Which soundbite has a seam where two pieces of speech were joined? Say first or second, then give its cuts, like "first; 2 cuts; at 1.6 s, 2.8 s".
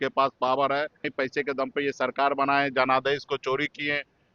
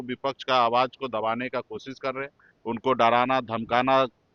first; 1 cut; at 1.1 s